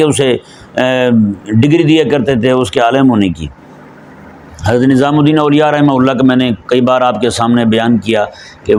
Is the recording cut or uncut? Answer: uncut